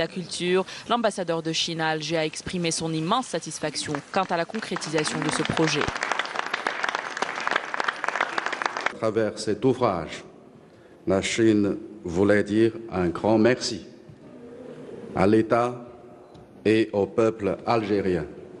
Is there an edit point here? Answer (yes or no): yes